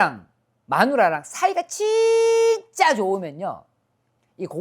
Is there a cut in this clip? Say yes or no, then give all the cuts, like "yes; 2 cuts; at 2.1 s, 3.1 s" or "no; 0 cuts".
no; 0 cuts